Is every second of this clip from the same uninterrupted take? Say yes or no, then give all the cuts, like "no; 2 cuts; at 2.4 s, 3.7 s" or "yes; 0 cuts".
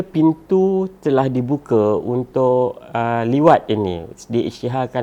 yes; 0 cuts